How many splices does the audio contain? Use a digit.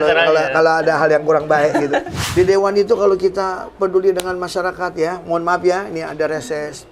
1